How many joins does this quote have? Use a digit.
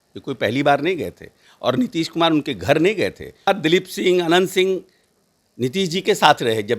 1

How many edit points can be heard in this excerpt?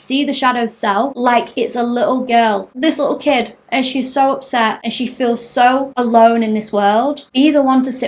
5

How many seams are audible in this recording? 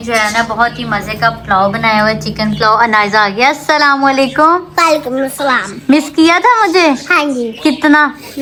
0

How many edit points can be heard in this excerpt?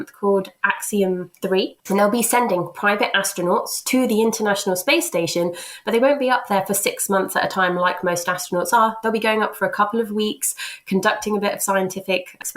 1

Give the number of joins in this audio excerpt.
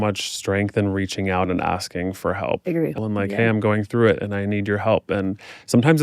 1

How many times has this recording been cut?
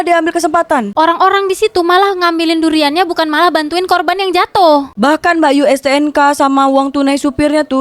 1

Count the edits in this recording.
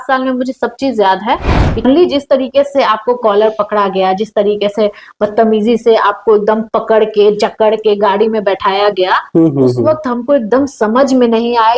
1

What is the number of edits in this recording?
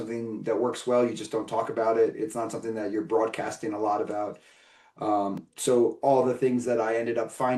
0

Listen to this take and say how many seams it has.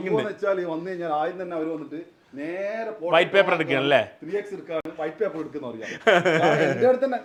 0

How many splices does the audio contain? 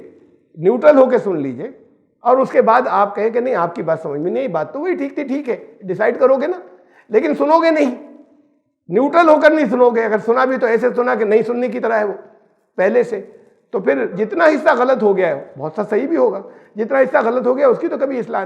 1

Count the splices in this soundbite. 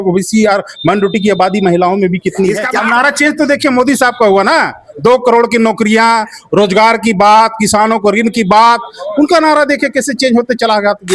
1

